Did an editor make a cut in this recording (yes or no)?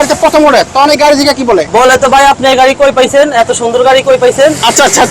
yes